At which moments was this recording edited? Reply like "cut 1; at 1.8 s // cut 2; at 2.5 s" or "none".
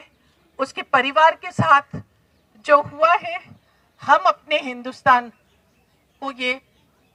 none